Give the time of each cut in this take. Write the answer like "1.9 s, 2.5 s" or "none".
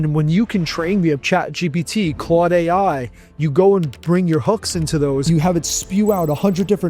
5.2 s